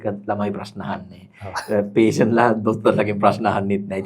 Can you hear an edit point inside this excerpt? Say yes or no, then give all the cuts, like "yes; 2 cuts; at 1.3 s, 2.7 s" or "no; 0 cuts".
no; 0 cuts